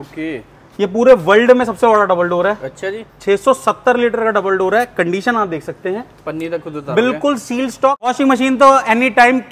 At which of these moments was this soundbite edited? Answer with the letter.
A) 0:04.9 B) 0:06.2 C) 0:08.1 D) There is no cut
C